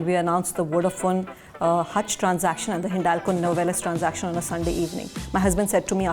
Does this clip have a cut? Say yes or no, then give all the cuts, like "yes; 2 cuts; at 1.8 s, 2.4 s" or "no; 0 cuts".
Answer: no; 0 cuts